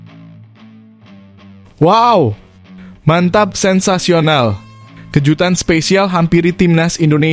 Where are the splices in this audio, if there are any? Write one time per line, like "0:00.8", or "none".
none

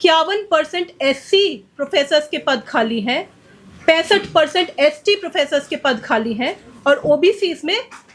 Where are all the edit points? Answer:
none

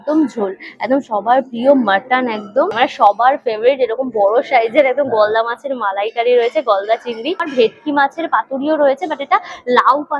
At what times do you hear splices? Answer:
0:02.8
0:07.5

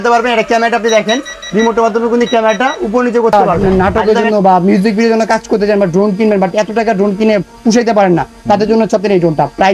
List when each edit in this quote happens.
0:03.3

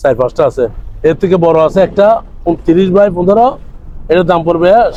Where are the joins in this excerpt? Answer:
none

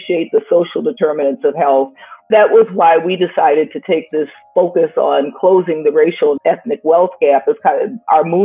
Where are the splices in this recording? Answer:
0:02.3
0:06.4

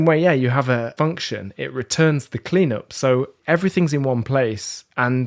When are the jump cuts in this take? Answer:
0:00.9
0:03.4

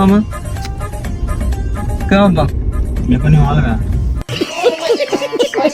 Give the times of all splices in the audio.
none

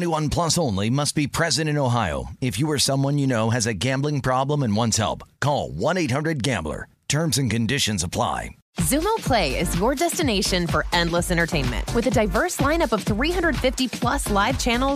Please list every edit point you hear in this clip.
0:08.6

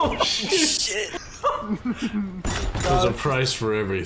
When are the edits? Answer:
0:01.2

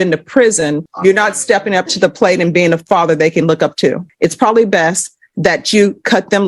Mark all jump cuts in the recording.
0:00.9
0:04.1

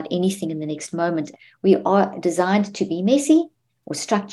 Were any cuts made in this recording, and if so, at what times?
0:01.3

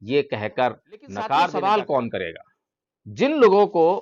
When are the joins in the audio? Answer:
0:01.5

